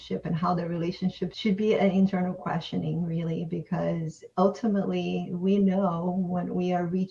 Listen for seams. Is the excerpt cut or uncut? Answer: cut